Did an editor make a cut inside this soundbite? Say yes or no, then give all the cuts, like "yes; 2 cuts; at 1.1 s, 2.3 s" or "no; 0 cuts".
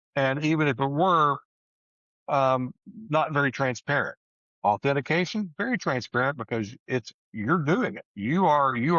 no; 0 cuts